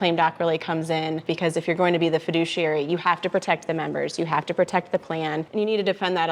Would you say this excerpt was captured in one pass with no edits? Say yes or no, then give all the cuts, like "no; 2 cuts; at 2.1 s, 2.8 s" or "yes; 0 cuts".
no; 2 cuts; at 1.3 s, 5.5 s